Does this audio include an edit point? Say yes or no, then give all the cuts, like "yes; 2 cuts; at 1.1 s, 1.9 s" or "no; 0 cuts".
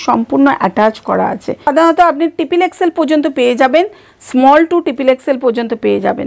yes; 1 cut; at 1.7 s